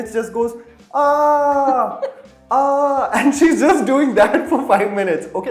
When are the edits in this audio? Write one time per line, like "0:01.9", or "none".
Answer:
none